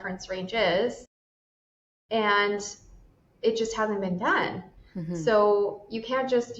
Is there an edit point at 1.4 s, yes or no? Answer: yes